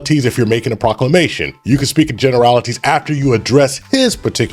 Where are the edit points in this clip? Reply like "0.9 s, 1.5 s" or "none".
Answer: none